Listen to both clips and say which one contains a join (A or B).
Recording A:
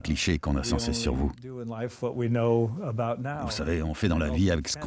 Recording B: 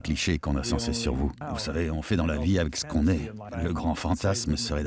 B